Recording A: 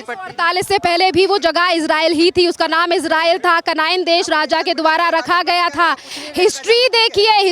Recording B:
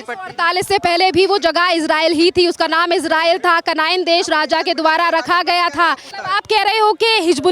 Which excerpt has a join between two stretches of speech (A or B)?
B